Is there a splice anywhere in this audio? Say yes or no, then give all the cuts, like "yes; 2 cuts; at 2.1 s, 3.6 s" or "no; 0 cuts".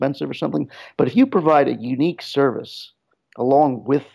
no; 0 cuts